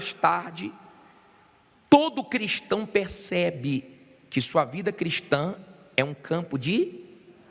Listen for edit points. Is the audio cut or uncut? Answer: cut